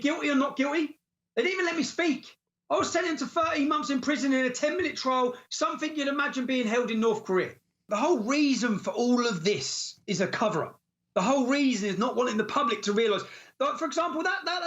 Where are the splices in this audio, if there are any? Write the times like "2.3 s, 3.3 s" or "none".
7.9 s